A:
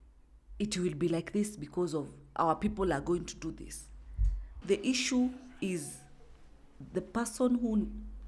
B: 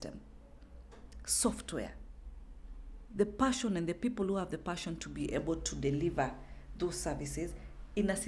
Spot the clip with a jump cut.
A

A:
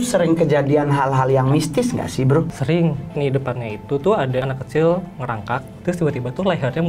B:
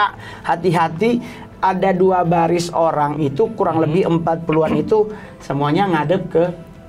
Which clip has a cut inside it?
A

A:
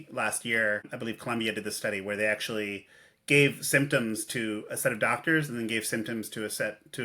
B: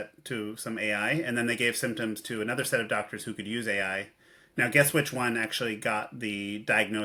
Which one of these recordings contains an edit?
A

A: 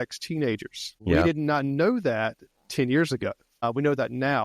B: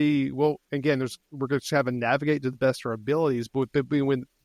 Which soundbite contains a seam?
A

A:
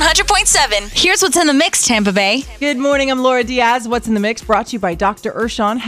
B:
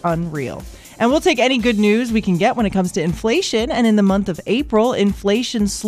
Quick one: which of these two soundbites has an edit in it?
A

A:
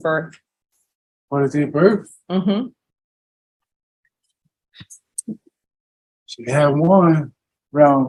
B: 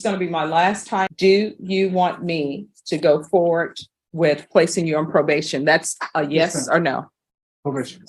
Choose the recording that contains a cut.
B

